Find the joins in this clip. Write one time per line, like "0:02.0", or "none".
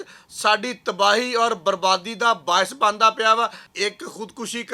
0:03.6